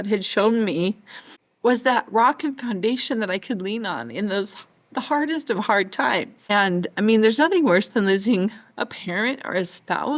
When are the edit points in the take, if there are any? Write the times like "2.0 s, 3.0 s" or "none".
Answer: 6.4 s